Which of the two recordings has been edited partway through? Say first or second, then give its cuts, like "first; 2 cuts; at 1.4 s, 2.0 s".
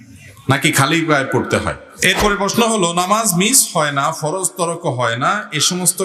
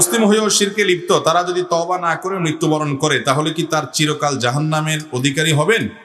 first; 1 cut; at 1.8 s